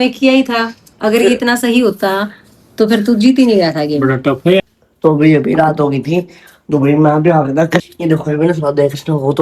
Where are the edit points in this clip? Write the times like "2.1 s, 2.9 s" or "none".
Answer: 4.6 s, 7.8 s

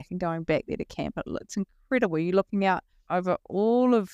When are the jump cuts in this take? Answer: 2.9 s

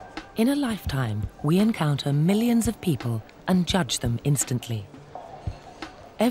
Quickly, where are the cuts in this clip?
4.1 s

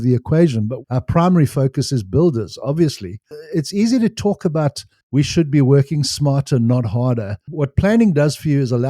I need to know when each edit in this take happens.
0.8 s, 3.2 s, 7.4 s

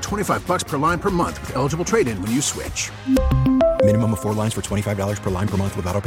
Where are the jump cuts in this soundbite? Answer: none

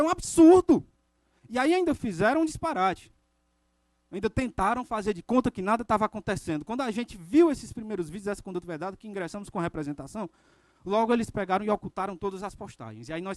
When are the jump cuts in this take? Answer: 2.1 s, 7.5 s, 11.3 s

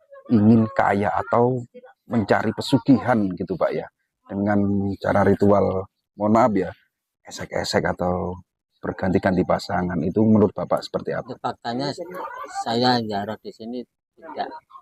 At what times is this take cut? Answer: 11.3 s

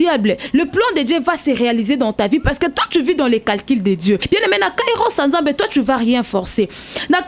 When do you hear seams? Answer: 4.2 s

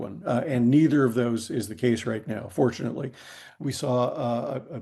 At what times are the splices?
3.4 s

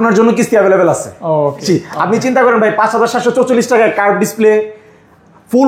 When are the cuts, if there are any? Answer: 1.6 s

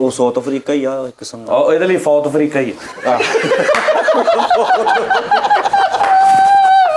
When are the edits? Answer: none

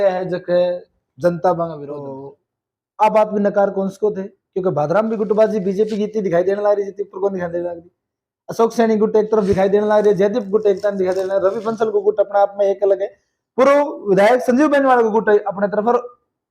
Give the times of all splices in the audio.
2.0 s

